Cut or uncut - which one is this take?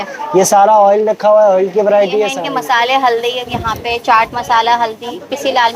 cut